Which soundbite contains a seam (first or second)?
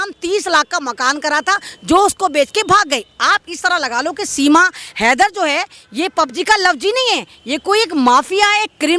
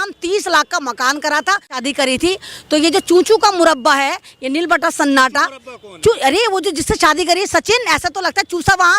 second